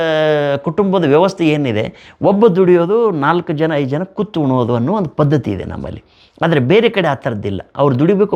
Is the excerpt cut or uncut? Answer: uncut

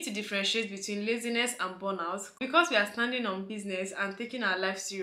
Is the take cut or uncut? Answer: cut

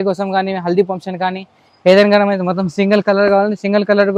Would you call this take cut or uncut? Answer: uncut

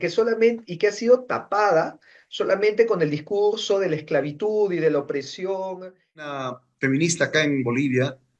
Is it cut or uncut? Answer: cut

